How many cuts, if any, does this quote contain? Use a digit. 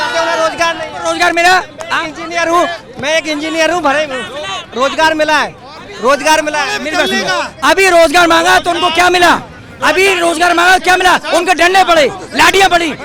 0